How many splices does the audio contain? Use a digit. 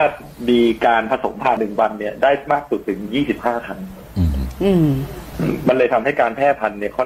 1